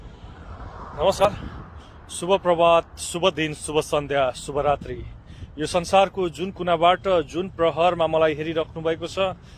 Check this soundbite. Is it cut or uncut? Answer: cut